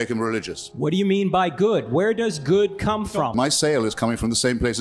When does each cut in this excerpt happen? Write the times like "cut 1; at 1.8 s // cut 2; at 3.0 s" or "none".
cut 1; at 3.3 s